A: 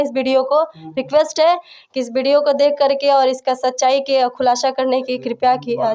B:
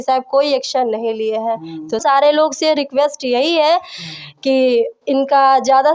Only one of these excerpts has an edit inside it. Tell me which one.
B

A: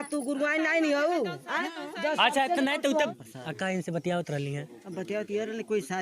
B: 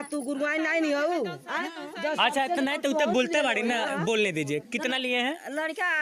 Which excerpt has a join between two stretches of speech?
A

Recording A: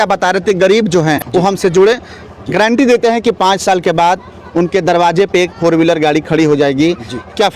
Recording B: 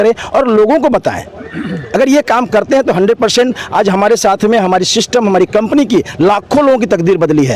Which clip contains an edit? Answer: A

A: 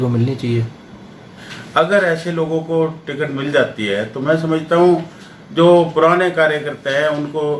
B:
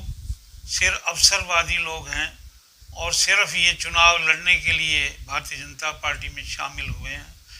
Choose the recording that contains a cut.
A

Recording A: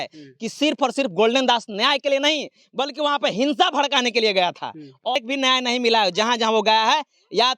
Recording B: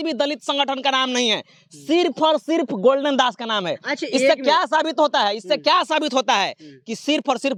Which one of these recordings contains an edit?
A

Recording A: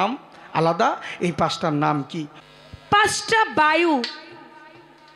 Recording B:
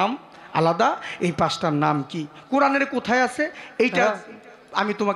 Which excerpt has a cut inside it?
A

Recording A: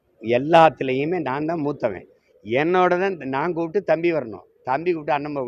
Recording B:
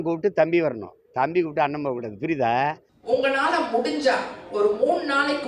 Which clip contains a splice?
B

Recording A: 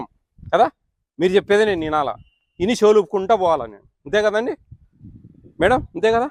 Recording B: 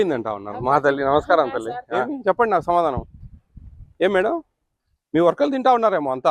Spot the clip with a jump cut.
B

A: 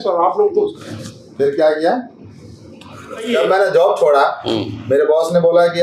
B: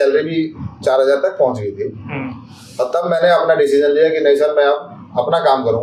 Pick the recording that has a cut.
A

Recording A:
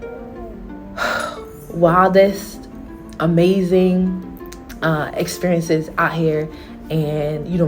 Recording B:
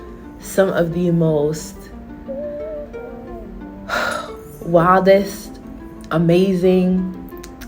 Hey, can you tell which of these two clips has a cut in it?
A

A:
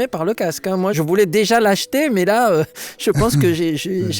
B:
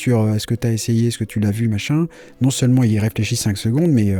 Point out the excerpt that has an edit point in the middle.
A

